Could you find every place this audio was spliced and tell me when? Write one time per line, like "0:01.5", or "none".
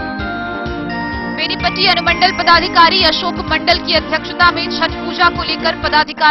0:01.3